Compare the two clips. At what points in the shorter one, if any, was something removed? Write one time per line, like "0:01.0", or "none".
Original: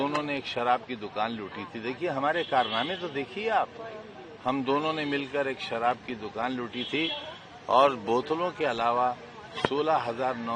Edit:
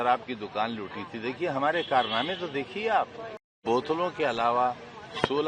0:03.6